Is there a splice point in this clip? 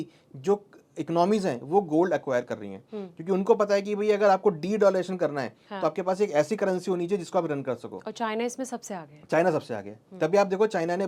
no; 0 cuts

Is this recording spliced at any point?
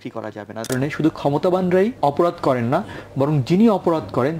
yes; 2 cuts; at 0.7 s, 2.0 s

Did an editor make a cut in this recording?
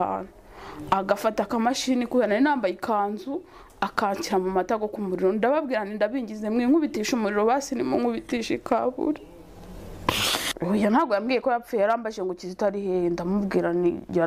yes; 1 cut; at 10.4 s

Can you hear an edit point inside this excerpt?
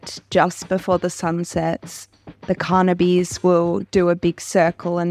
no; 0 cuts

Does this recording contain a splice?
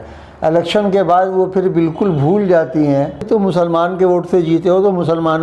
yes; 1 cut; at 3.2 s

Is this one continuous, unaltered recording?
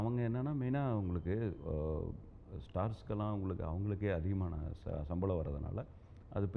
yes; 0 cuts

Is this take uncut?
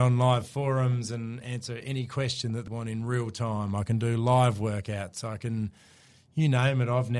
no; 1 cut; at 2.7 s

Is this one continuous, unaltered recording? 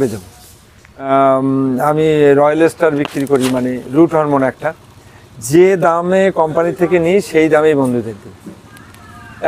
no; 1 cut; at 1.1 s

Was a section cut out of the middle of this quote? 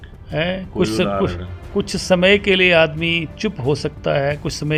no; 0 cuts

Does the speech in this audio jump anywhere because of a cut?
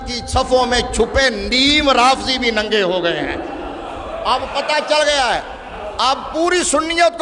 no; 0 cuts

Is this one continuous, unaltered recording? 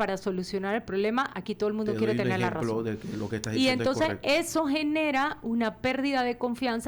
yes; 0 cuts

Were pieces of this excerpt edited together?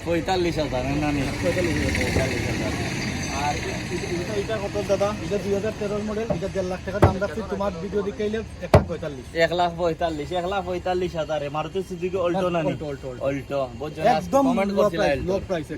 no; 0 cuts

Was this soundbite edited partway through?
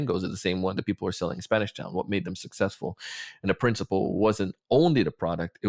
no; 0 cuts

